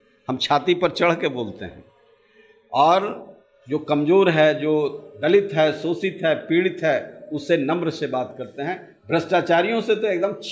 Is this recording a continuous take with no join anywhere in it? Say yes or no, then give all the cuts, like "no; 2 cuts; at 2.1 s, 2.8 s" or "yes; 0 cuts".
yes; 0 cuts